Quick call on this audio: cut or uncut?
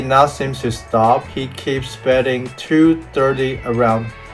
uncut